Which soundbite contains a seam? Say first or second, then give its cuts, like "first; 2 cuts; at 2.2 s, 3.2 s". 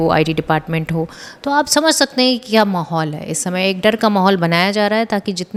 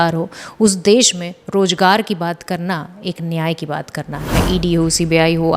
second; 1 cut; at 4.3 s